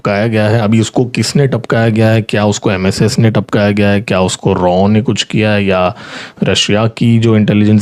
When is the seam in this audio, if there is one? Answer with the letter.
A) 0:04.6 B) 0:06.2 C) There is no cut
C